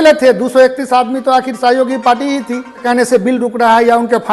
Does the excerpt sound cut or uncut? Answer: cut